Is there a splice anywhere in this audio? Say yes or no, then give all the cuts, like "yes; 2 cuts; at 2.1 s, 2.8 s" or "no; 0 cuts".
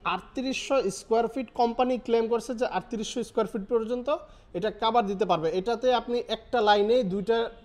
no; 0 cuts